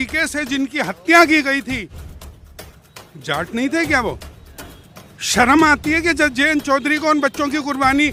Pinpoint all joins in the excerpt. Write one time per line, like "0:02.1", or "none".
none